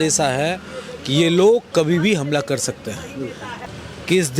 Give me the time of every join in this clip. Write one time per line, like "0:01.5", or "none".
0:03.5